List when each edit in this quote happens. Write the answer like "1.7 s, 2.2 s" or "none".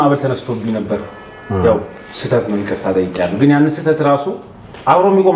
none